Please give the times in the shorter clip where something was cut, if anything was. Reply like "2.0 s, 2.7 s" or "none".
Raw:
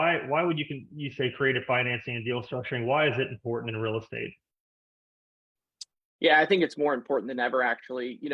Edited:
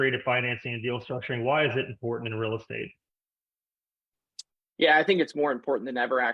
none